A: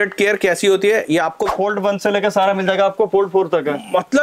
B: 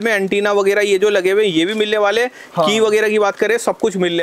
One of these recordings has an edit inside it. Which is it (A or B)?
A